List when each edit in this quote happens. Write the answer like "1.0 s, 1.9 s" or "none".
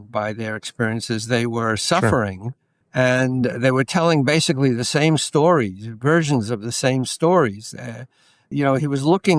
8.4 s